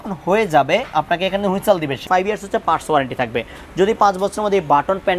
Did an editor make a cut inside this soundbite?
yes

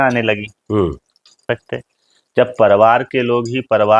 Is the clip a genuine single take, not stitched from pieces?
no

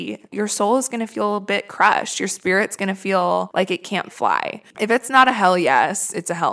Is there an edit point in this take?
yes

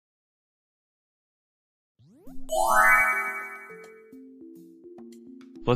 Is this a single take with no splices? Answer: yes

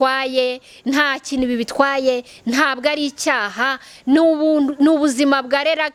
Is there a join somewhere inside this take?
no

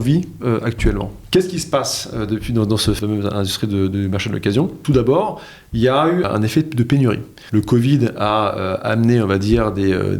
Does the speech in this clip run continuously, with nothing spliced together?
no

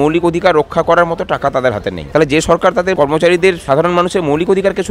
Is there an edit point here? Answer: yes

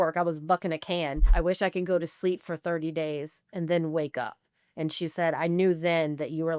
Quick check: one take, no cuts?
no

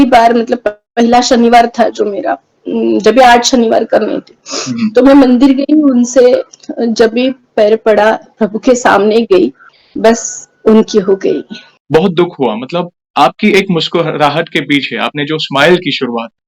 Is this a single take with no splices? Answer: no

